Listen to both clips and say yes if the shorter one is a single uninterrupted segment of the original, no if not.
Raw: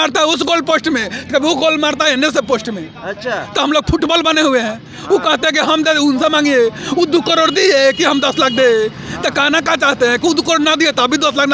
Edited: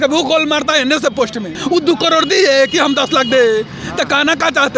no